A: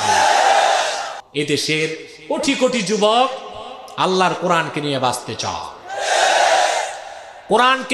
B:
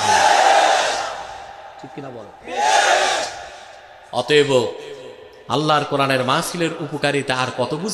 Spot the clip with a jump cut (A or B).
A